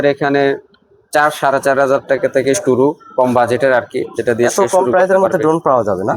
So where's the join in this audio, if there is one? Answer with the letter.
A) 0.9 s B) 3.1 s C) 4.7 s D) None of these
D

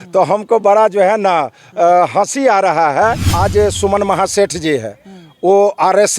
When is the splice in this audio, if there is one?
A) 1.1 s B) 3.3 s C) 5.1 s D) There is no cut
B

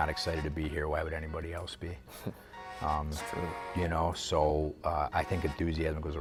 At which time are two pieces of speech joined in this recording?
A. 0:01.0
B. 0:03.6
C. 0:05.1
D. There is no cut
D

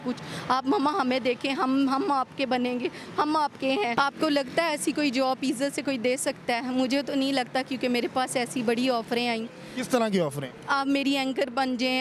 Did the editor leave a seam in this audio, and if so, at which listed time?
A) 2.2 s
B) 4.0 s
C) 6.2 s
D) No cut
B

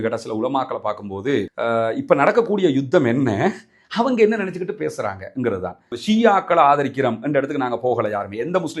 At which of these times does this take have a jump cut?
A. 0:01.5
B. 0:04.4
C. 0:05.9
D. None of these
C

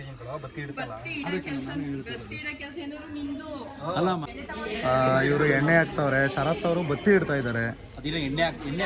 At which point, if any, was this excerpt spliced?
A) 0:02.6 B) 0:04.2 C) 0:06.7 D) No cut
B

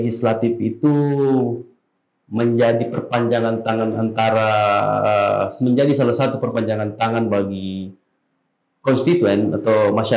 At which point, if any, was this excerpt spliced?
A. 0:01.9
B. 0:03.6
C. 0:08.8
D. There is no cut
D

